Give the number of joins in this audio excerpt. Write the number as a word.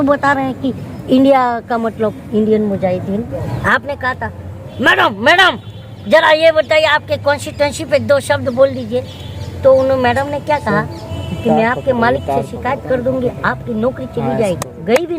one